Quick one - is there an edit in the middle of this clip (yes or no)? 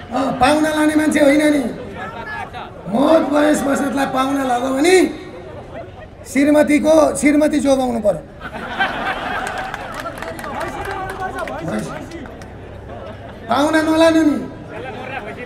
no